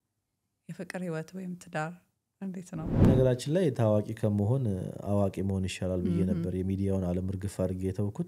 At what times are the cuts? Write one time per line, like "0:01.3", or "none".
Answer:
0:03.0

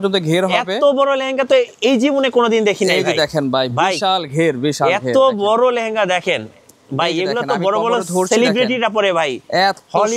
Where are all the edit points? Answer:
none

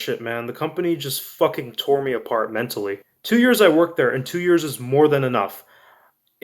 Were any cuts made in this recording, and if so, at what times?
0:03.1

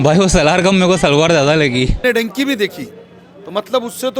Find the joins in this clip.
0:02.0

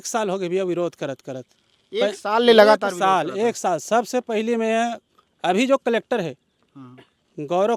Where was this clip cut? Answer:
none

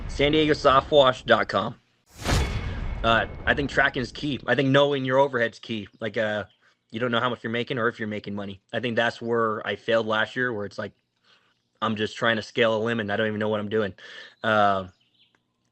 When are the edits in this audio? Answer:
0:02.3

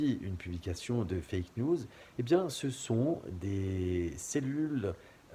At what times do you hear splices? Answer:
none

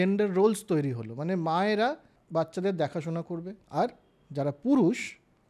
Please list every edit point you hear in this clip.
0:02.1
0:03.6

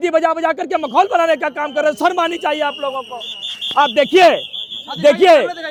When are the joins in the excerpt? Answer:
none

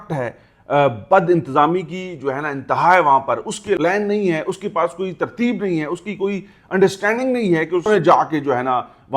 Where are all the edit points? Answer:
0:03.8
0:07.9

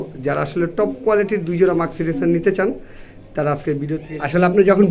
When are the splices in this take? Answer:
0:04.0

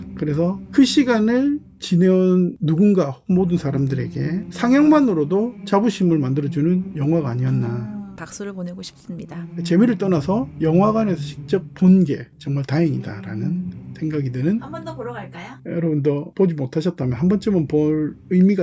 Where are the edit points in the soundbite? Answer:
0:15.5

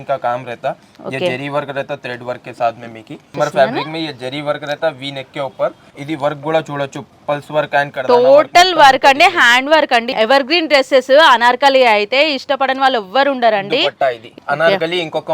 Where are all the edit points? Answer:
0:03.2
0:05.9
0:10.1
0:14.3

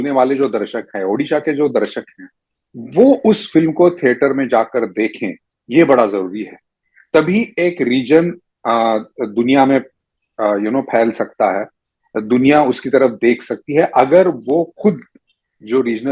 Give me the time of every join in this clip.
none

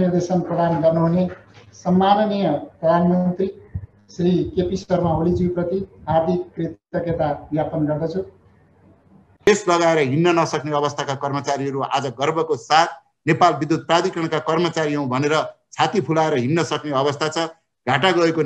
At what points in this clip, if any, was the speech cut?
0:09.5

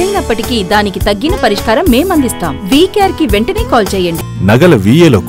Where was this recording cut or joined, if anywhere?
0:04.3

